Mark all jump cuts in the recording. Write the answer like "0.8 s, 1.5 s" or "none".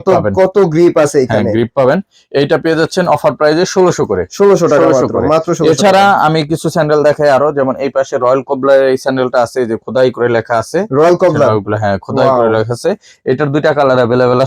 none